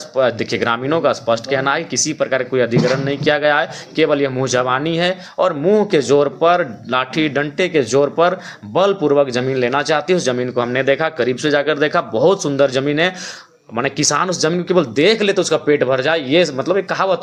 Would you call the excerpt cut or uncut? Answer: uncut